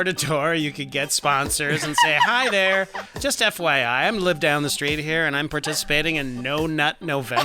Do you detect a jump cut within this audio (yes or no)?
yes